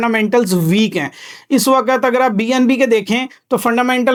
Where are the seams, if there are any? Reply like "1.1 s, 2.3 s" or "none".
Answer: none